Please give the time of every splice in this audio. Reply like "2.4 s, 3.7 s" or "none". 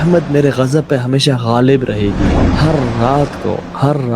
2.4 s